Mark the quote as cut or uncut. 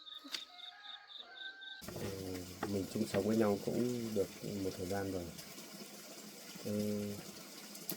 cut